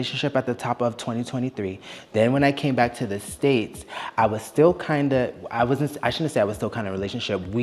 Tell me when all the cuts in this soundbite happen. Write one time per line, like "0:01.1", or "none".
none